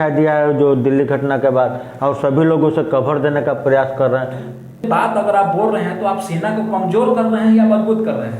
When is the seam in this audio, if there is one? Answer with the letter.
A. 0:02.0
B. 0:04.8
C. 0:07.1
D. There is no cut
B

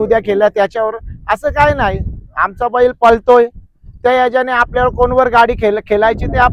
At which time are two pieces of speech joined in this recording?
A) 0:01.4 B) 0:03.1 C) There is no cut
C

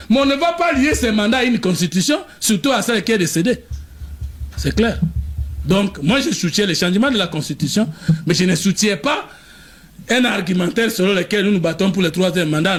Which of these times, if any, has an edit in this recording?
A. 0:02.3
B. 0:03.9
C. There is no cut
C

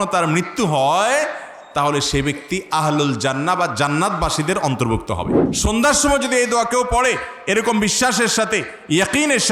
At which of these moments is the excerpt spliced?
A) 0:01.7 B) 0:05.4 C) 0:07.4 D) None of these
B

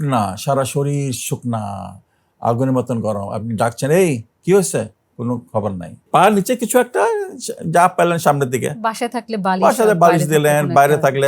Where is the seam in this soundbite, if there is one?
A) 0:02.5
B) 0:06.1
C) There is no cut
B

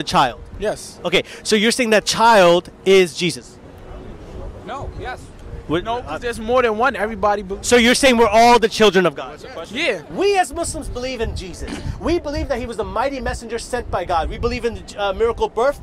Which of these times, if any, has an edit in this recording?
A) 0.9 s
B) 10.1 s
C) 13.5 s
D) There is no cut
B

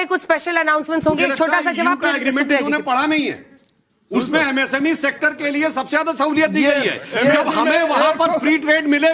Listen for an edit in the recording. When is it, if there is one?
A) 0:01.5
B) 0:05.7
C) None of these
C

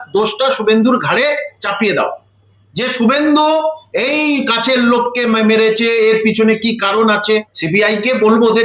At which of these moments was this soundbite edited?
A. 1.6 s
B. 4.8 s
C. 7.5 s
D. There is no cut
C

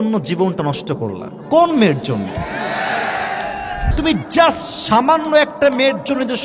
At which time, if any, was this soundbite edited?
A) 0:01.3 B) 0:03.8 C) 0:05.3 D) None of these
B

